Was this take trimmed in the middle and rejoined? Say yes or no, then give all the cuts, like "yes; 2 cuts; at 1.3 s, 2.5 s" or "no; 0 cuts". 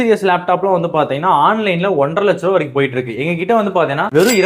no; 0 cuts